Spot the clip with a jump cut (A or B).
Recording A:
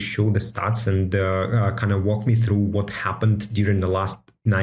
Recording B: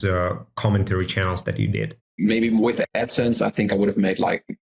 B